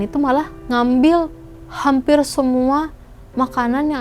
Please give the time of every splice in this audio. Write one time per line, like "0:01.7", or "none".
none

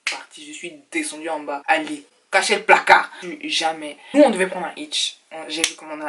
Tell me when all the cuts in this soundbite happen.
0:03.2

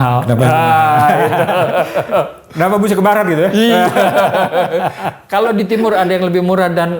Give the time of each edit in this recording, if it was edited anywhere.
none

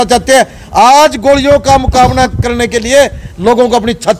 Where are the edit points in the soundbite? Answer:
none

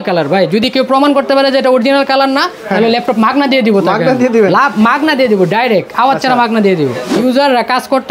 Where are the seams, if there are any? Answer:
0:07.1

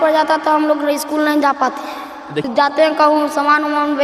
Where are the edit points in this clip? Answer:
0:02.5

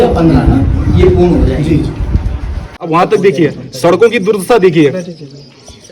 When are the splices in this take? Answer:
0:02.7

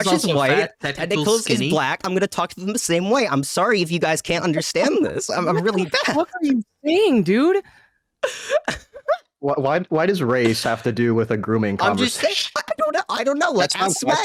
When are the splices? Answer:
none

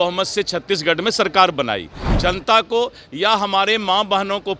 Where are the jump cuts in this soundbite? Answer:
0:02.1

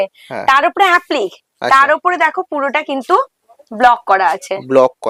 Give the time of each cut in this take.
none

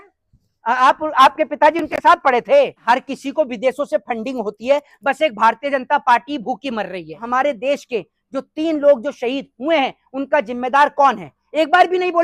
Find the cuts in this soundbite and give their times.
0:02.8
0:07.2

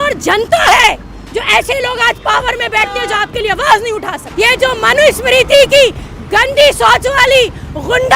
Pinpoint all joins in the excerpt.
0:04.2

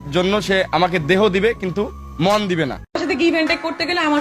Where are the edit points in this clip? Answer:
0:03.0

